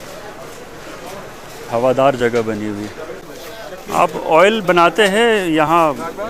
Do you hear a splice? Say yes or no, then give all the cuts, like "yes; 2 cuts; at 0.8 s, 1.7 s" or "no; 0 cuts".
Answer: yes; 1 cut; at 3.3 s